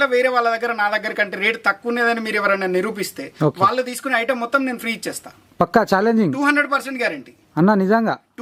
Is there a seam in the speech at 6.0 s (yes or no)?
no